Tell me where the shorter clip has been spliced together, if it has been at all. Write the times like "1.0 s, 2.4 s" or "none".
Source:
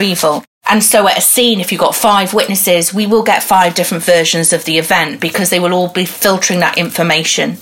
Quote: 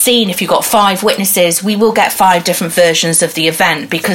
none